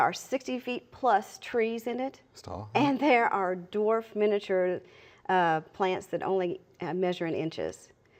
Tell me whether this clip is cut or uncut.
uncut